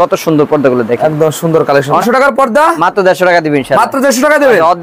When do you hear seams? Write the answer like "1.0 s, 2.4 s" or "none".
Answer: 2.0 s